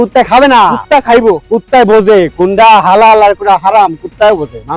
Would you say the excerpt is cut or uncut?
uncut